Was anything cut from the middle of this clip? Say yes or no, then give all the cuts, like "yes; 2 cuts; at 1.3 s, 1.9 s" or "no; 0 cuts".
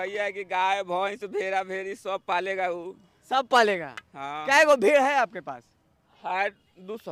no; 0 cuts